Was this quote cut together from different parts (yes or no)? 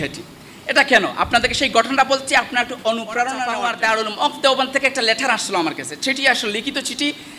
yes